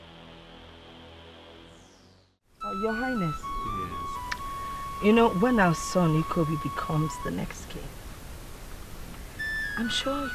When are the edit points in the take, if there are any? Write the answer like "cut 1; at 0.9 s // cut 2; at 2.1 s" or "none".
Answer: cut 1; at 2.3 s